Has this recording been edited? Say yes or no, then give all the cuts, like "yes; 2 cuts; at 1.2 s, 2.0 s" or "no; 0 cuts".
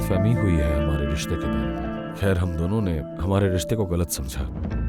yes; 1 cut; at 1.9 s